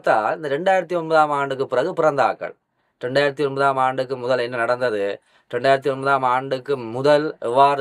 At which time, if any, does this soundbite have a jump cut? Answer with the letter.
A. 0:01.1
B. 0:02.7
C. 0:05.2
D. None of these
D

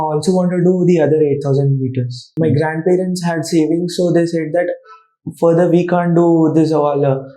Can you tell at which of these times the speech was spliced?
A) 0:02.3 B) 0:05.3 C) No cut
A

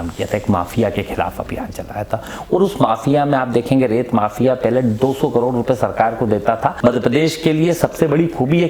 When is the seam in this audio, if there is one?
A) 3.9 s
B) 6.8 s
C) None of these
B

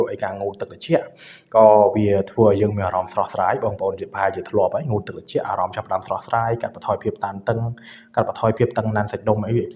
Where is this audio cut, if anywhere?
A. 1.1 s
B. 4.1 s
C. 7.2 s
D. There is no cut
D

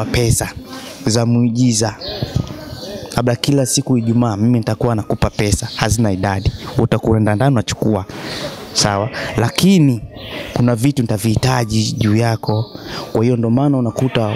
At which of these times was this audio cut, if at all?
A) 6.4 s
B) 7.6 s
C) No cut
C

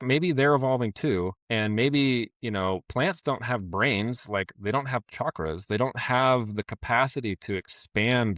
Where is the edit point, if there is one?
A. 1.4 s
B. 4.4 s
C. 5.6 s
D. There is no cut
A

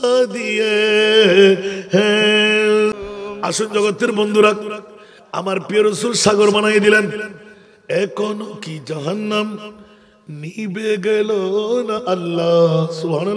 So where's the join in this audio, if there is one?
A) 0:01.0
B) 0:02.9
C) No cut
B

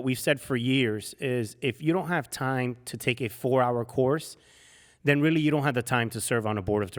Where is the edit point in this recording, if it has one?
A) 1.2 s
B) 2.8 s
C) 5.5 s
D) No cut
D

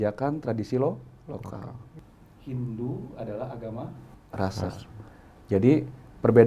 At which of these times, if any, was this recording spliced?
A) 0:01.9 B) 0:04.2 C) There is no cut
A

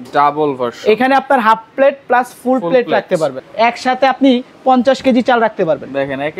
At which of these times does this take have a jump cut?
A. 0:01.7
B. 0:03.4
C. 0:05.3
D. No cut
B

